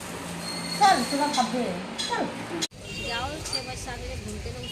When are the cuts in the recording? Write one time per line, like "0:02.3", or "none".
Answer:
0:02.6